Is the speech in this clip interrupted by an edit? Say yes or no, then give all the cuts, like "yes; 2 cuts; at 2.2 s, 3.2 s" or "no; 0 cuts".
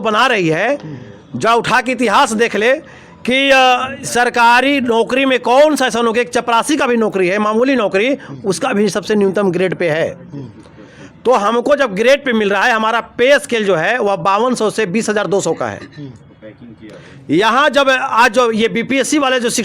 no; 0 cuts